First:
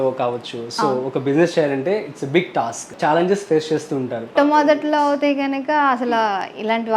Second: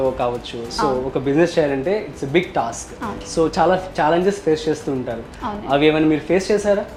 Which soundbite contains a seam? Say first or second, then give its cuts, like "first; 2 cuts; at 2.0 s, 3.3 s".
first; 2 cuts; at 2.9 s, 4.4 s